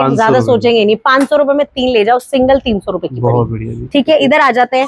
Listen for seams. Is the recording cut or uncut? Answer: uncut